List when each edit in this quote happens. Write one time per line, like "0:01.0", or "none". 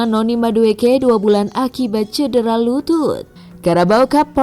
0:03.3